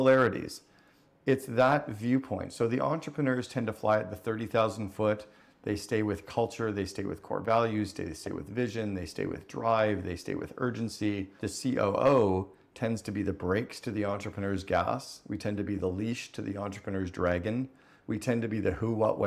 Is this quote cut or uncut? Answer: uncut